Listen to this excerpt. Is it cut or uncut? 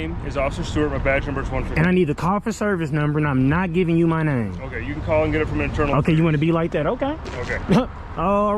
uncut